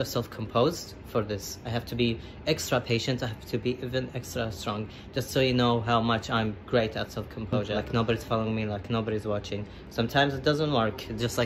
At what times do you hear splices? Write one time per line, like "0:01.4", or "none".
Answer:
0:07.7